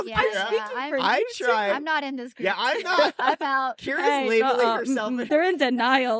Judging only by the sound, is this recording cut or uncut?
cut